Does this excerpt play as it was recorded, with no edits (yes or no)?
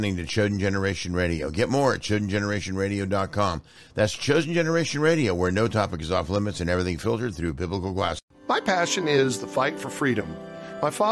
no